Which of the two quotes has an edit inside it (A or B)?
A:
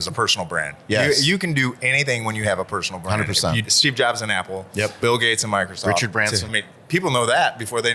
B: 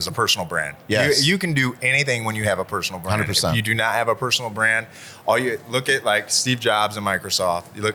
A